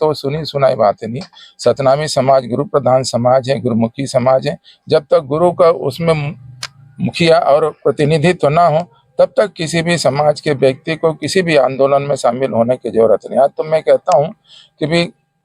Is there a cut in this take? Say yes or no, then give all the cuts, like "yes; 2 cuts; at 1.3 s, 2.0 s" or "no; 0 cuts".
no; 0 cuts